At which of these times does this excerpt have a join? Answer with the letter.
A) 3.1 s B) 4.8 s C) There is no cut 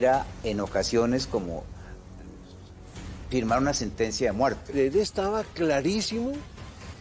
B